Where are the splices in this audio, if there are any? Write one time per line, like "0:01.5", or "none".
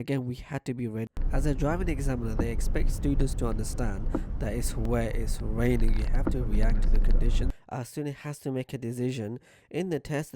0:01.1
0:07.6